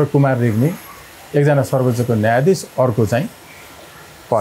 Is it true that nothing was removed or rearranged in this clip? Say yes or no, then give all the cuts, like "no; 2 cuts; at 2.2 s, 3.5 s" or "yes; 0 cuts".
yes; 0 cuts